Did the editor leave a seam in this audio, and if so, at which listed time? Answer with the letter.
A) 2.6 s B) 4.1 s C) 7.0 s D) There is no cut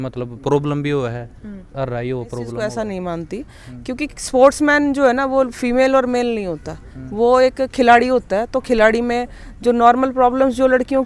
A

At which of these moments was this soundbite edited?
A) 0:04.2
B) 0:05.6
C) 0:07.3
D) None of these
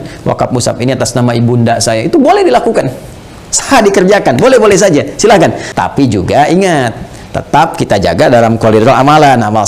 B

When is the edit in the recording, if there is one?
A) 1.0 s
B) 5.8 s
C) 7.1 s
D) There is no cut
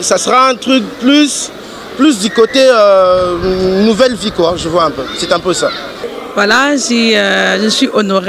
B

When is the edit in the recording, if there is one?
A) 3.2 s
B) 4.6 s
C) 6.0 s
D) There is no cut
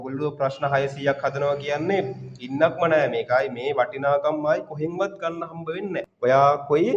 C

